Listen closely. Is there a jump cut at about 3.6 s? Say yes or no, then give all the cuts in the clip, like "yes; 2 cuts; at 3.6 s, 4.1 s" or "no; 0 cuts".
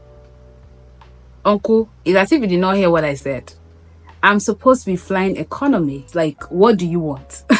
no; 1 cut; at 6.0 s